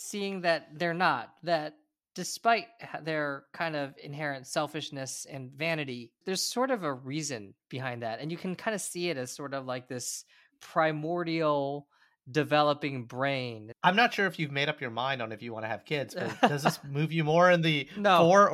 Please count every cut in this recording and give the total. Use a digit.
1